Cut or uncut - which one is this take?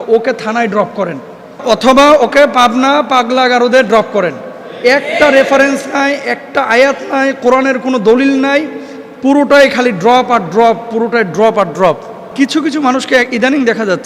cut